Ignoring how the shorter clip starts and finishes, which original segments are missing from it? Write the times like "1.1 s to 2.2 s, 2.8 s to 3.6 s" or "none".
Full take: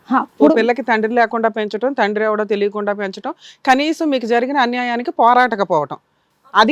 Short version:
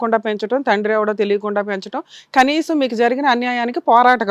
none